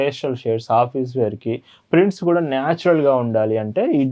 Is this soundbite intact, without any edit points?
yes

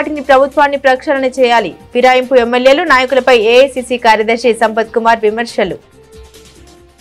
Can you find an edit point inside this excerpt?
yes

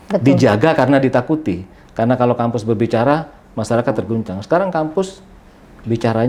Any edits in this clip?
no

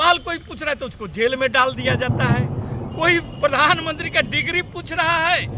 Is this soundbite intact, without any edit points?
yes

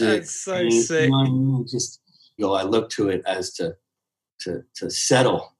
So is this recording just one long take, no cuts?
no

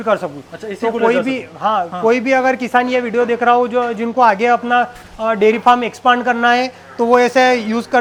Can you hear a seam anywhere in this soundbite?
no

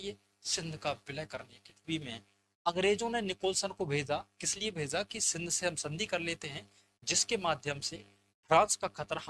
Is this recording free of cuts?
no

